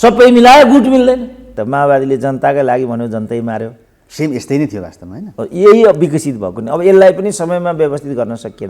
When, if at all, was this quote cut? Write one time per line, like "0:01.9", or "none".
0:01.5